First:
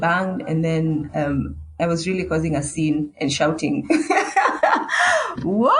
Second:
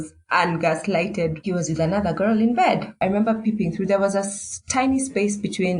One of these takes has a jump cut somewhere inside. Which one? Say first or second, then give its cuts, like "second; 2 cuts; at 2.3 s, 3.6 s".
second; 2 cuts; at 1.4 s, 2.9 s